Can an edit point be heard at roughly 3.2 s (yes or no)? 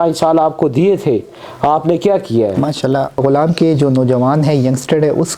yes